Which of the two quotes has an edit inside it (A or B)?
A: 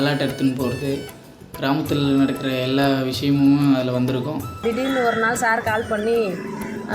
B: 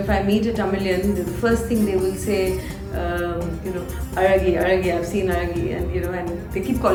A